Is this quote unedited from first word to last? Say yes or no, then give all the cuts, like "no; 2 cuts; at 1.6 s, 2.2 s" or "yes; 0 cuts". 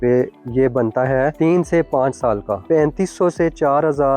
no; 2 cuts; at 1.3 s, 2.6 s